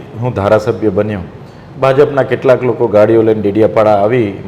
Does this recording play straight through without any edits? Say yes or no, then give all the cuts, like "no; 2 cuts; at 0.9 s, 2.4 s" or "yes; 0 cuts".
yes; 0 cuts